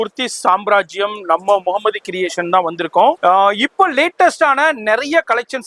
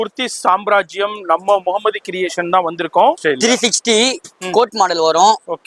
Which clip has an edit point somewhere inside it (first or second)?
second